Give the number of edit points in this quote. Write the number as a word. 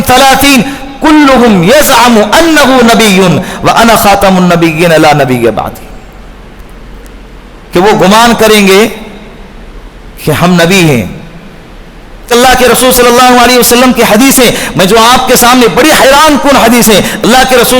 one